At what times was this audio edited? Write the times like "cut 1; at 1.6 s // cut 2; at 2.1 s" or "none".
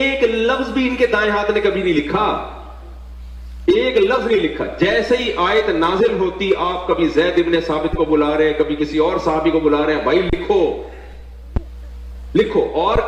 none